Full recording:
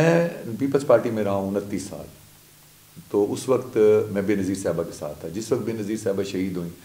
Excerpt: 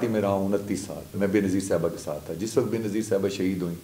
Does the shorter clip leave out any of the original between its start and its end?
yes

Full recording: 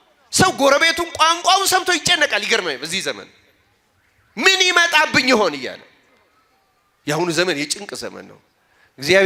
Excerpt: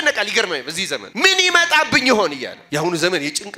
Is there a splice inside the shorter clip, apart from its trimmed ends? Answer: yes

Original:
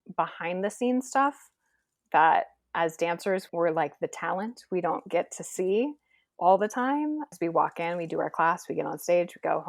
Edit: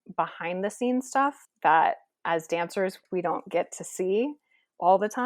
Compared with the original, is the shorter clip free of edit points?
no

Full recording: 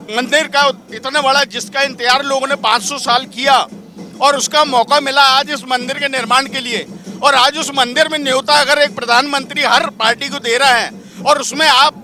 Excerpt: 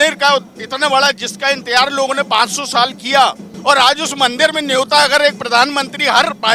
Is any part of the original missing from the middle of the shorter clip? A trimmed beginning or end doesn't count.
yes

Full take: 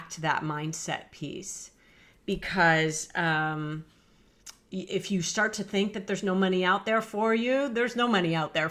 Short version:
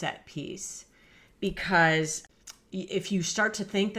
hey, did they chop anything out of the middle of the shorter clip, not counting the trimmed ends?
yes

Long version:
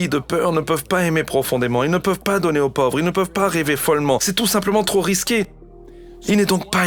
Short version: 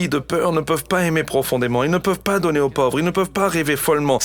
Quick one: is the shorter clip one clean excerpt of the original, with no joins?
yes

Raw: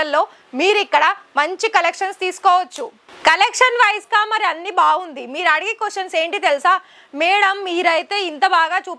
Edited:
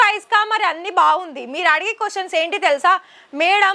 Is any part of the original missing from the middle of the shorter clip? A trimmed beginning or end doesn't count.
no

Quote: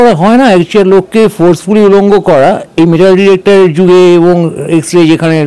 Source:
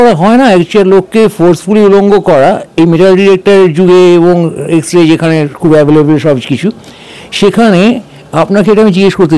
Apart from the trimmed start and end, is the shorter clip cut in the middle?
no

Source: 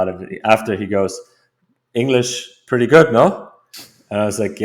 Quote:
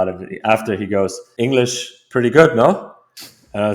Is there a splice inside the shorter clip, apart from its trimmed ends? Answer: yes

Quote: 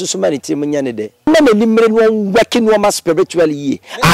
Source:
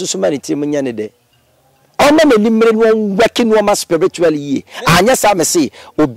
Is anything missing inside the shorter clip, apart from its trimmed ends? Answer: yes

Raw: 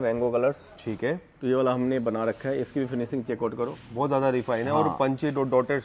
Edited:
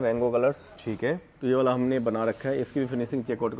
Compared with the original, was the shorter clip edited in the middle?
no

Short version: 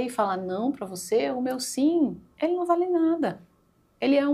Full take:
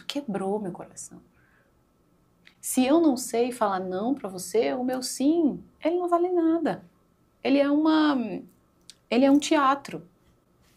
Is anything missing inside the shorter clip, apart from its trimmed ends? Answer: no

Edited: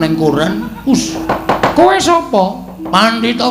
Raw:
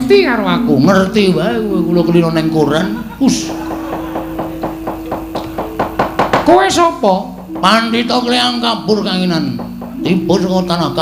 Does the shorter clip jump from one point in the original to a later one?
yes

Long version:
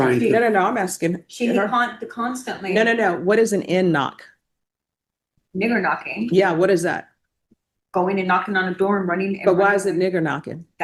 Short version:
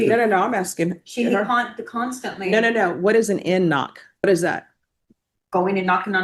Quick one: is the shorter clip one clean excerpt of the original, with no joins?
no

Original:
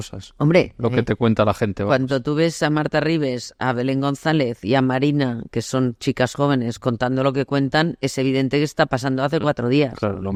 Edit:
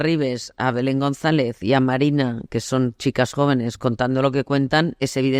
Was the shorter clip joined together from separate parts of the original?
no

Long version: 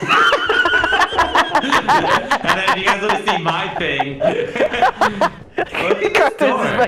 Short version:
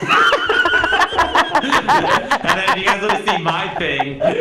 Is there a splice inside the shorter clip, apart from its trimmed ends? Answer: no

